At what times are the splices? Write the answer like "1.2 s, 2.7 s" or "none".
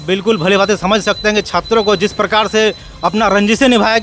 none